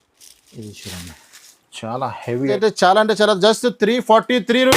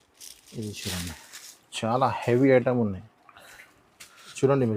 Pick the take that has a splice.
first; 1 cut; at 2.5 s

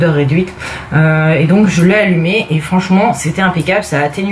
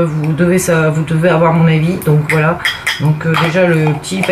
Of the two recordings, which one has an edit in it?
first; 1 cut; at 3.2 s

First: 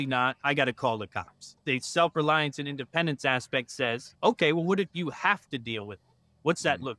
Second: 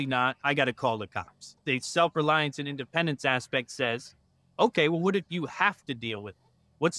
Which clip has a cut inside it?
first; 1 cut; at 4.1 s

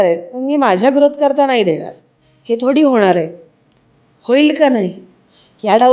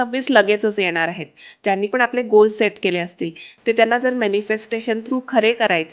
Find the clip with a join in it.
second; 1 cut; at 1.6 s

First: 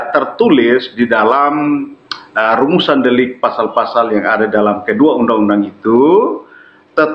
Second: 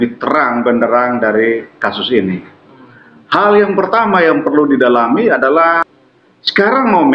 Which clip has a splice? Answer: second; 1 cut; at 5.9 s

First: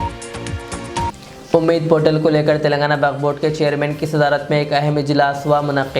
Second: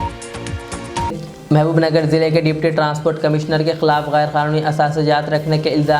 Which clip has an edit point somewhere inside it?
first; 1 cut; at 1.1 s

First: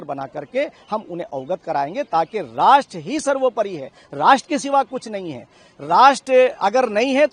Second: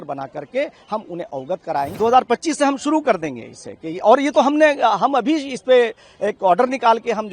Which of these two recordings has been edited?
second; 1 cut; at 1.9 s

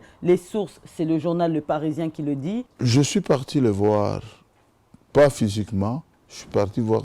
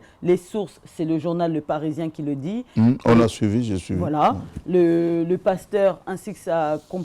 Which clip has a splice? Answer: first; 1 cut; at 2.6 s

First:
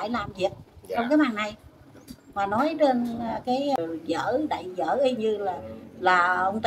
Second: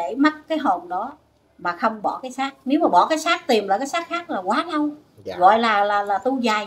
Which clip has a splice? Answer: first; 1 cut; at 3.8 s

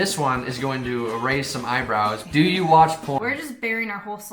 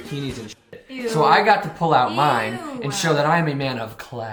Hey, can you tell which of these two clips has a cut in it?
first; 2 cuts; at 2.2 s, 3.2 s

